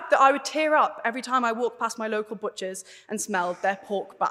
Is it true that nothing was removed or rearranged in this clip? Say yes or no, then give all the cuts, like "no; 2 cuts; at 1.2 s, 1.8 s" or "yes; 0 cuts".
yes; 0 cuts